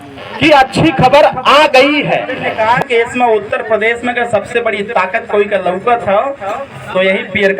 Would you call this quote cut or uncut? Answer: cut